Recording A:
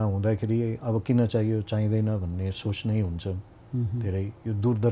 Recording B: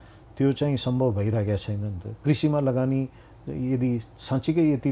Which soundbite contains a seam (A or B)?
B